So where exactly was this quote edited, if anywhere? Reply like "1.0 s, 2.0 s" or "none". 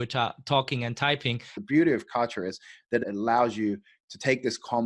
1.5 s, 3.0 s